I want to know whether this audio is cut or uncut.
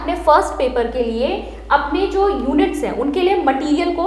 uncut